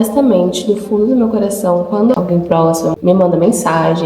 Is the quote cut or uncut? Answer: cut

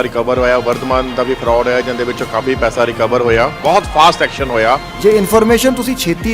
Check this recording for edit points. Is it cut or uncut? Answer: cut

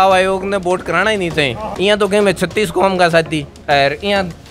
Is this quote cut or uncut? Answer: cut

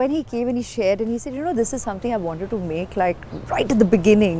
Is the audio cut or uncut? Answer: uncut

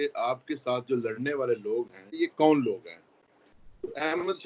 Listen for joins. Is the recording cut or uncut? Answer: cut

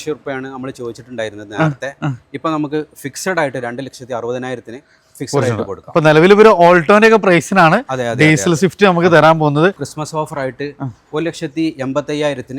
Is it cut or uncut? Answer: cut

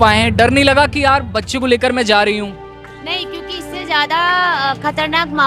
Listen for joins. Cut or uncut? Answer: uncut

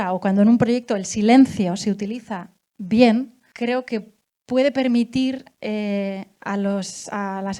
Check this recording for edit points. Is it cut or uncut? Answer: cut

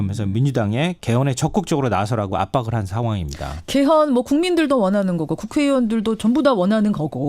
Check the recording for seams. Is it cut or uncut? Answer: cut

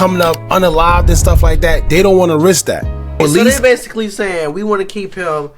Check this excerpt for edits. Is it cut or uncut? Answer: cut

